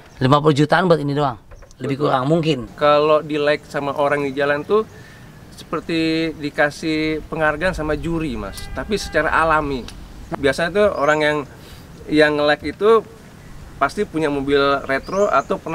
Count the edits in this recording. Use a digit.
2